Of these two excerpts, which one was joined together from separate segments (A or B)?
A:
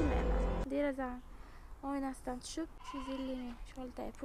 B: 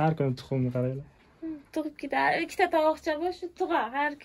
A